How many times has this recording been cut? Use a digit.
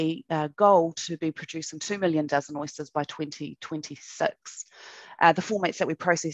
0